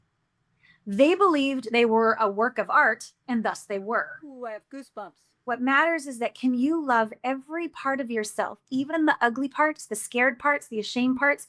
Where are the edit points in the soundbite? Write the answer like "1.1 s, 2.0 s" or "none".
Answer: 5.3 s